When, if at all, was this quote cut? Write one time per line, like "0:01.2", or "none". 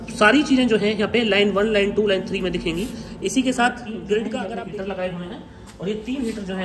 0:04.4